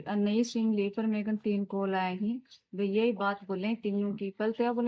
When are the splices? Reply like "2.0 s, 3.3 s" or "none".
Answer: none